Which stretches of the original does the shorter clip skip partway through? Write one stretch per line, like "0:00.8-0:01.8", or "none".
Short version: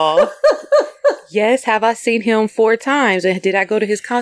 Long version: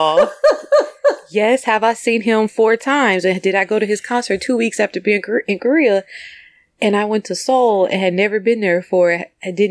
none